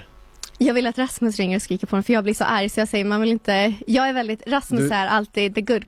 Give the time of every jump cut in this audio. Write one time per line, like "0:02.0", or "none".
none